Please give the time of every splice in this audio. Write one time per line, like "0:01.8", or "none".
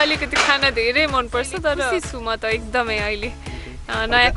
0:02.0